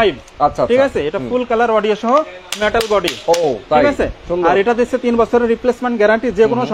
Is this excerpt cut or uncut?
uncut